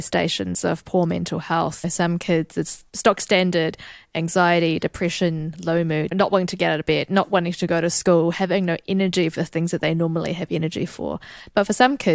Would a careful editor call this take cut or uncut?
cut